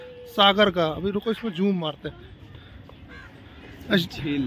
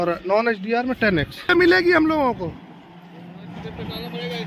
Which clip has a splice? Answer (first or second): second